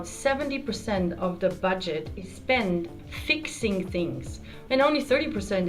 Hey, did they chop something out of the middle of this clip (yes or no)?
yes